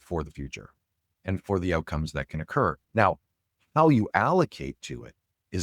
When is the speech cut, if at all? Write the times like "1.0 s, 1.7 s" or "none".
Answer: 2.8 s